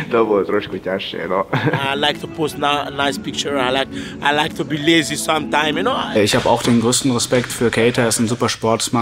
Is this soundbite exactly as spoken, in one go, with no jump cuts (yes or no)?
no